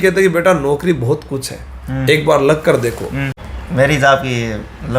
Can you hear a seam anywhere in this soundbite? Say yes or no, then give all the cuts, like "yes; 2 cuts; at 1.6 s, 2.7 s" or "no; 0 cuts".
yes; 1 cut; at 3.4 s